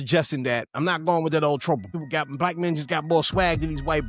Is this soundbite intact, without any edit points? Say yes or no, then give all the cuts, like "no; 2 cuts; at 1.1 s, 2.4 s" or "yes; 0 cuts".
no; 1 cut; at 1.9 s